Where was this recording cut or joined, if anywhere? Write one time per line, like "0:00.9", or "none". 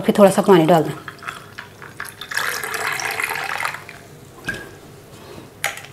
none